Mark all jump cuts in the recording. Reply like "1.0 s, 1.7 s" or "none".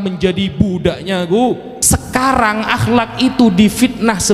1.7 s